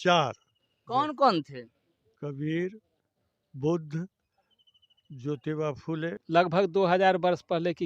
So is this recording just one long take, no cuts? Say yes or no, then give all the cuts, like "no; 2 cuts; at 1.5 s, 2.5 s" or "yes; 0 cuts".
no; 1 cut; at 6.1 s